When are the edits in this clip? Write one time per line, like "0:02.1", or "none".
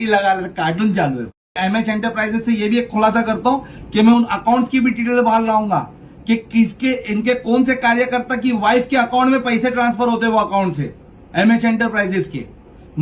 0:01.6